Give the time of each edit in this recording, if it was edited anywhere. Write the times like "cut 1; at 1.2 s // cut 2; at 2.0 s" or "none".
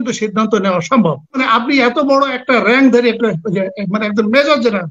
cut 1; at 1.4 s